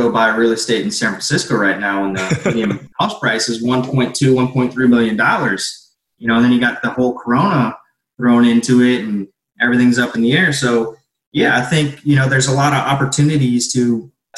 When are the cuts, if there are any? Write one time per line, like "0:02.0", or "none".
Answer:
0:02.8